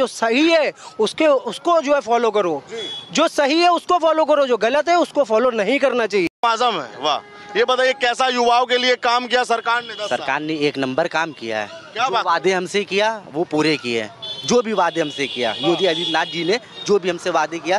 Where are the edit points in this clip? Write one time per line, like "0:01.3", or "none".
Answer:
0:06.3